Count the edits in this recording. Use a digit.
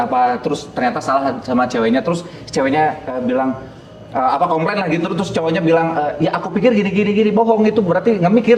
0